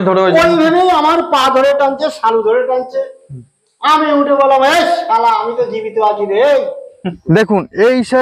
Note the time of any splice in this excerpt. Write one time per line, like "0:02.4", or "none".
0:07.2